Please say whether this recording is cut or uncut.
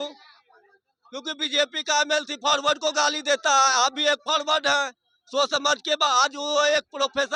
uncut